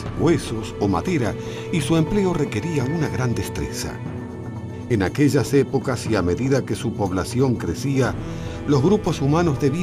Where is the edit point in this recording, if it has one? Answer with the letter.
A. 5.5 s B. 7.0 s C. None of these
A